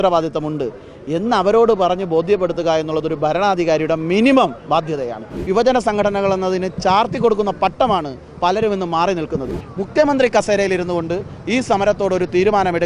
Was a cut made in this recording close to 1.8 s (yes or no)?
no